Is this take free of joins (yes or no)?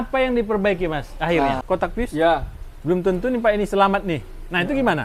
no